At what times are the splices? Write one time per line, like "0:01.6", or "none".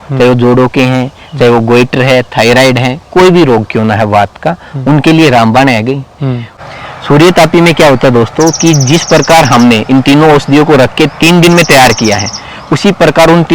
0:06.5

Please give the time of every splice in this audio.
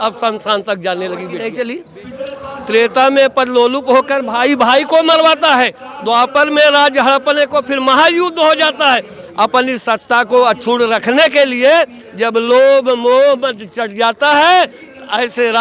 0:01.3

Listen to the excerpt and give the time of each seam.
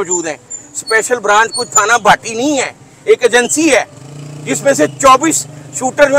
none

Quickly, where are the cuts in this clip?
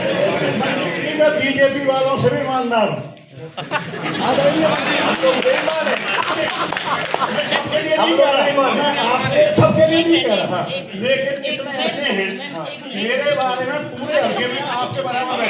none

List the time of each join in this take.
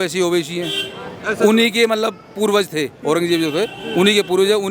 none

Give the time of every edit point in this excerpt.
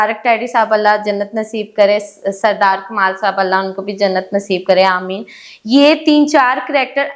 none

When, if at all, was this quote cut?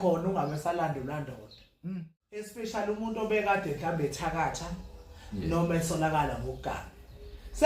0:02.5

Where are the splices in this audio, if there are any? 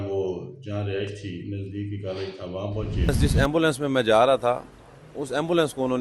0:03.1

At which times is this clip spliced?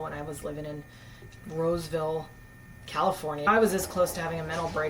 0:03.4

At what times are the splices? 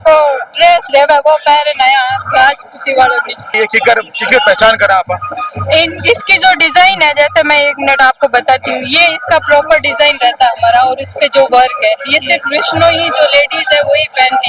none

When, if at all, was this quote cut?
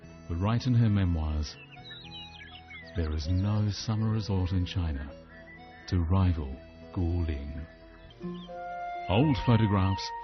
0:08.1

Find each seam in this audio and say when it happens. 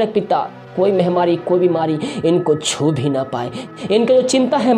0:03.6

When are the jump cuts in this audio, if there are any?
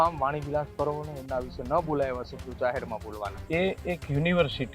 0:03.4

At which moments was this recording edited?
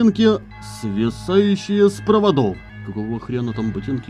0:02.7

